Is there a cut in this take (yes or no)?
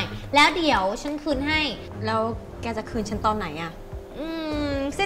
yes